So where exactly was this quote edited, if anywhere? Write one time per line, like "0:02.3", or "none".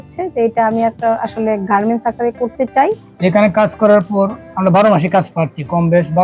0:03.1

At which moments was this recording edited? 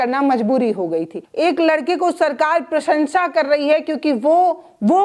0:01.2

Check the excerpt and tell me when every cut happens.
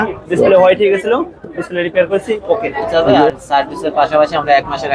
0:02.8

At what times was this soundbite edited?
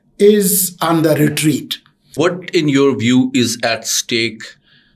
0:02.1

